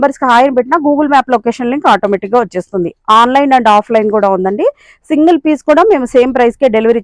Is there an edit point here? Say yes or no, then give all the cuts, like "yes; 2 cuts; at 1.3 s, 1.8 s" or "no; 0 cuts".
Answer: no; 0 cuts